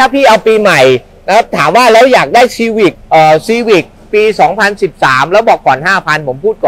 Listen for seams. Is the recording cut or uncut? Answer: uncut